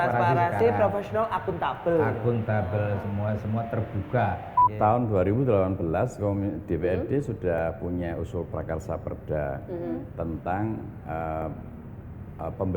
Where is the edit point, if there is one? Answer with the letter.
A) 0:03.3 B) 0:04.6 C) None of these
B